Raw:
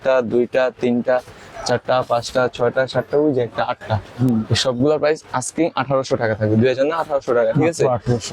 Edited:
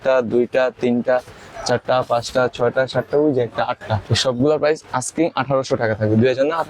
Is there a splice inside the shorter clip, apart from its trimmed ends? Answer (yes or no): yes